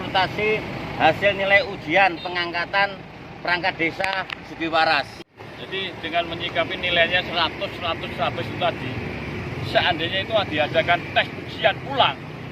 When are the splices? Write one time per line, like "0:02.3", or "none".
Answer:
0:05.4